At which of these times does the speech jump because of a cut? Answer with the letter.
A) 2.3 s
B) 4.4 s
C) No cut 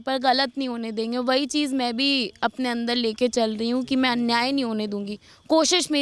C